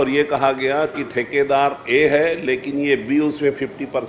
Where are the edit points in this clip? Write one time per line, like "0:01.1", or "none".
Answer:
none